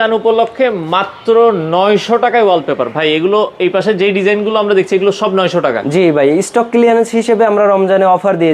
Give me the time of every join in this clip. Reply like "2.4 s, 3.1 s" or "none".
none